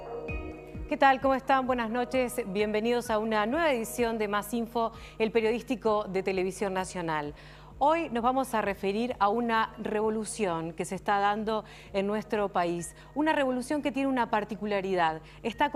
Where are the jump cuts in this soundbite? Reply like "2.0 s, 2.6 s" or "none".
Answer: none